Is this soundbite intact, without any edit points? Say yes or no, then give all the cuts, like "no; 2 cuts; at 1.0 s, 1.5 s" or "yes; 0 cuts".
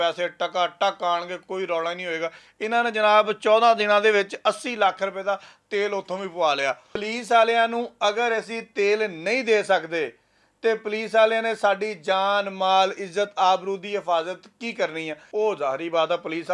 no; 2 cuts; at 7.0 s, 15.2 s